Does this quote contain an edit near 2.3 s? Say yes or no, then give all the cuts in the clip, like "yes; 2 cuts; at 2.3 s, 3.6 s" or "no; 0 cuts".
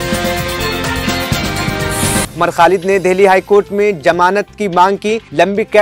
yes; 1 cut; at 2.3 s